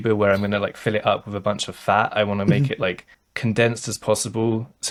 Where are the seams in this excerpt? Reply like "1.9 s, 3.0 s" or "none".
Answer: none